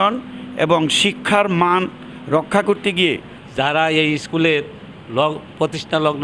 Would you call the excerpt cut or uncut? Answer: cut